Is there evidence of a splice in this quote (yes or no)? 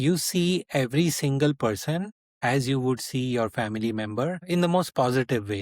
yes